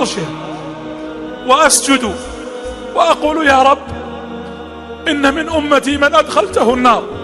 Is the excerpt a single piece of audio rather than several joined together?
yes; 0 cuts

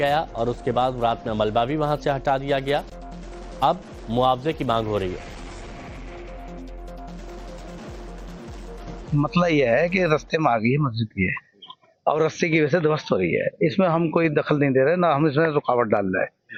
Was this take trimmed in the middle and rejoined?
no; 0 cuts

